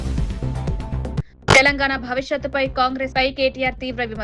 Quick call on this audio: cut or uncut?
cut